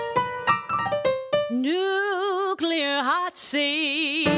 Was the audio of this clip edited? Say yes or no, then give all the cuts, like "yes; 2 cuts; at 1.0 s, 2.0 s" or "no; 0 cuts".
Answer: no; 0 cuts